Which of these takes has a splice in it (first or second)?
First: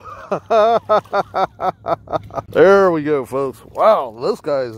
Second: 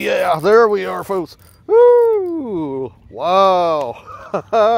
first